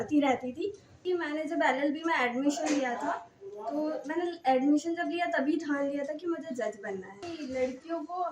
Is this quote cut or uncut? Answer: cut